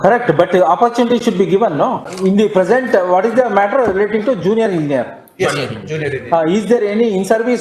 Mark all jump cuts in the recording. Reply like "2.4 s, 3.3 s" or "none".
2.1 s